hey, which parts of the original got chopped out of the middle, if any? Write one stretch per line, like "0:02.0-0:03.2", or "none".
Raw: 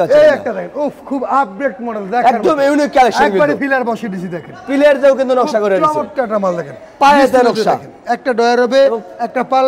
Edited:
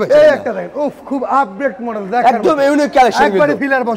none

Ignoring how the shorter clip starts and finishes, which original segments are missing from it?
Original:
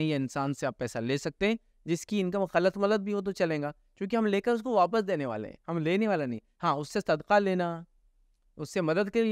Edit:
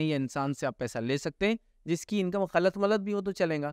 none

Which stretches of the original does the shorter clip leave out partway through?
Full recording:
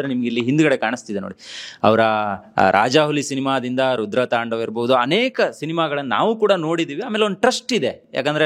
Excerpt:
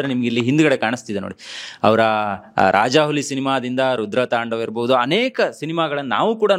none

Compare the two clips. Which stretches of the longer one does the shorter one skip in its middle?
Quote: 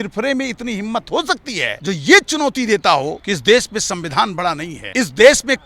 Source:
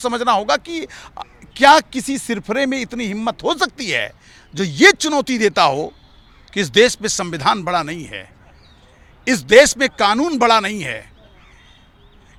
0:04.1-0:04.5
0:06.0-0:06.5
0:08.0-0:09.1

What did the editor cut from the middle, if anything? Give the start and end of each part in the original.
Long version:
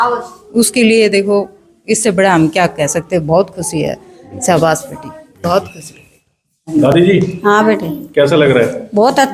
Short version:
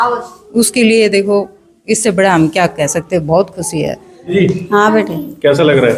0:04.3-0:07.1

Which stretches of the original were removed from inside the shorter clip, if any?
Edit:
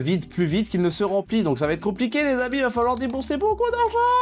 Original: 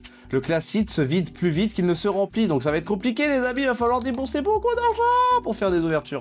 none

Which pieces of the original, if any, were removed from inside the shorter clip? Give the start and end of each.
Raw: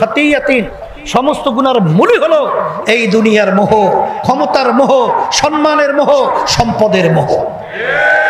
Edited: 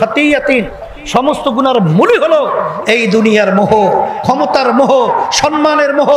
none

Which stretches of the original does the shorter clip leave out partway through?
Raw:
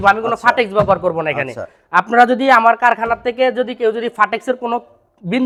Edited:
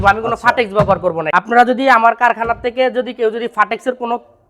0:01.2-0:01.8

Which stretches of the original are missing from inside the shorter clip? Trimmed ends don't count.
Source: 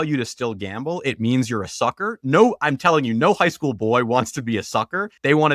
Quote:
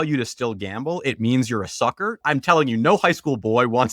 0:02.2-0:02.6

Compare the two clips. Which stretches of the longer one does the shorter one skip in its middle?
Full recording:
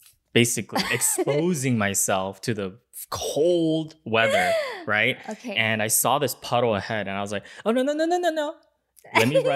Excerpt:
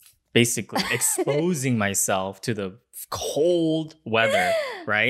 none

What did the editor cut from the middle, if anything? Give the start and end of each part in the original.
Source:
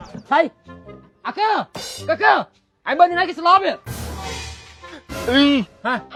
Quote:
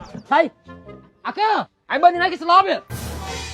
0:01.8-0:02.7

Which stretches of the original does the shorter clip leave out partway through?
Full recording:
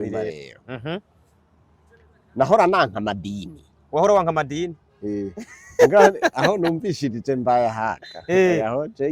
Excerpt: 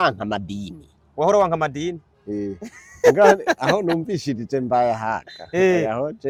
none

